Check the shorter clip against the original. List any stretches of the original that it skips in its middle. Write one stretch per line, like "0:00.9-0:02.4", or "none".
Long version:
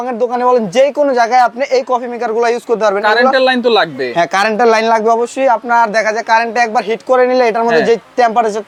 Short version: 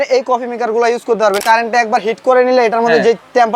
0:03.0-0:06.2

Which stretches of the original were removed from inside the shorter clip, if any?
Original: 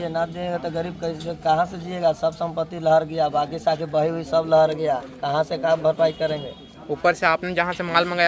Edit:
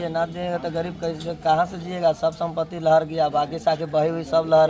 none

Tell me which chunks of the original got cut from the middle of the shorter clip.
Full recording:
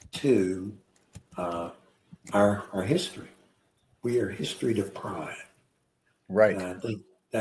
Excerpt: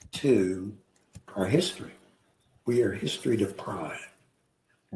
0:01.3-0:02.7

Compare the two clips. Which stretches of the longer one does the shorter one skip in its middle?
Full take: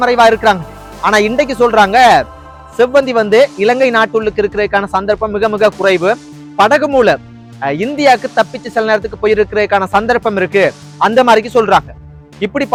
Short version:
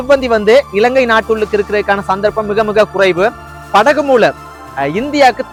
none

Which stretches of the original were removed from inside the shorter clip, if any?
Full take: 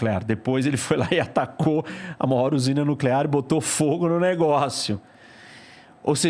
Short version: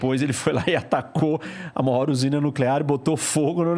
none

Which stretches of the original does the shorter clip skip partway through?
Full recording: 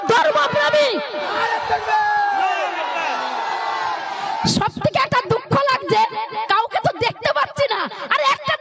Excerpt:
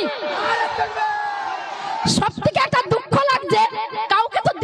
0:02.5-0:03.9

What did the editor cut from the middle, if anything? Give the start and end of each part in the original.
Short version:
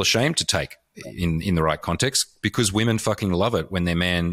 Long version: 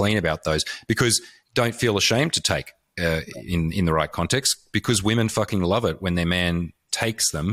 0:02.9-0:03.3

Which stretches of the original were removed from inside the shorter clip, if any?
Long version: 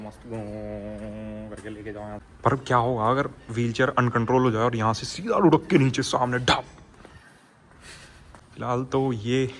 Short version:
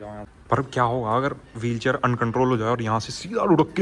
none

